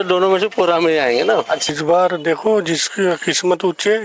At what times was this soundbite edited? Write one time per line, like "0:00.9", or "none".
0:01.6